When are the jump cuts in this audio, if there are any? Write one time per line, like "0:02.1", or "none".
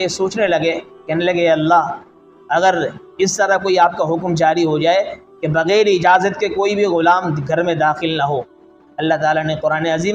0:01.0
0:08.8